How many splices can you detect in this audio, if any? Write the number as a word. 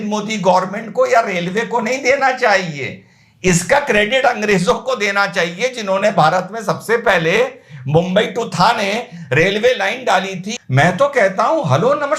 one